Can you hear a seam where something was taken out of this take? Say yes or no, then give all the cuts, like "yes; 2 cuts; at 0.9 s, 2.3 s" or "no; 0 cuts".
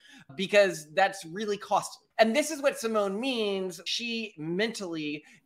yes; 2 cuts; at 2.1 s, 3.8 s